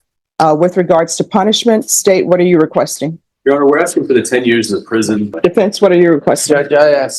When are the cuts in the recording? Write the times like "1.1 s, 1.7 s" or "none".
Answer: 5.3 s